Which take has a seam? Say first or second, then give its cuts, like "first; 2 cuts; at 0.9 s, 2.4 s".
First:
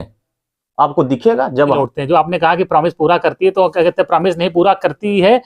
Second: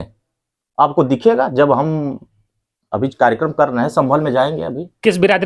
first; 1 cut; at 1.8 s